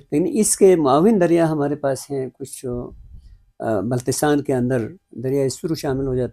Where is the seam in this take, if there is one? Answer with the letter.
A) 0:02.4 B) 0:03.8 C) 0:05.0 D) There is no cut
D